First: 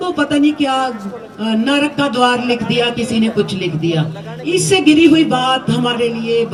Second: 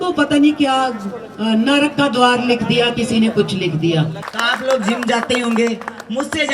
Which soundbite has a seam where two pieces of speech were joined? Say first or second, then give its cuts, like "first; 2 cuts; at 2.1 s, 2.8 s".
second; 1 cut; at 4.3 s